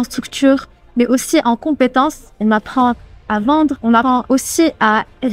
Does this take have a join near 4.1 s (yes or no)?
yes